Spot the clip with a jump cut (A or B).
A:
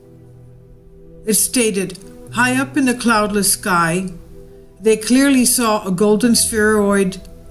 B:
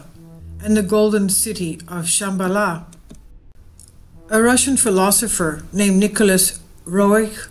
B